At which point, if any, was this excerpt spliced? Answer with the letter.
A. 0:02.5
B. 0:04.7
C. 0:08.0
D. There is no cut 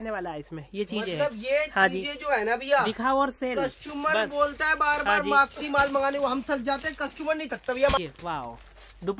C